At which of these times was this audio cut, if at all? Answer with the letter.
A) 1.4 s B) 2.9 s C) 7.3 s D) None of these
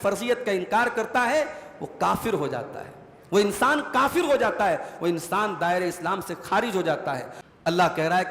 C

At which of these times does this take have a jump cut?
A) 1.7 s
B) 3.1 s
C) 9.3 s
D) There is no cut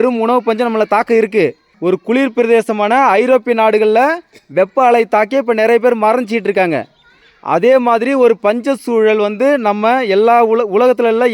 A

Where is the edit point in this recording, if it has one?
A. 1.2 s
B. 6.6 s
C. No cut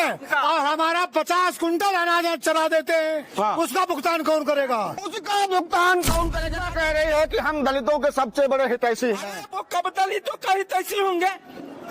B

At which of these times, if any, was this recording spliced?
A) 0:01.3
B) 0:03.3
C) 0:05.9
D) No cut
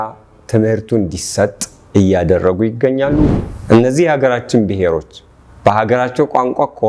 B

